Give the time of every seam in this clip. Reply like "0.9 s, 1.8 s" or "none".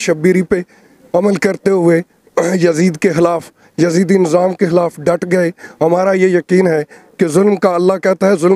none